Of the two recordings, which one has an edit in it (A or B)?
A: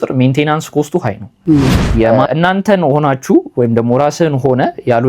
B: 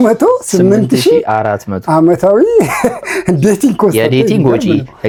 A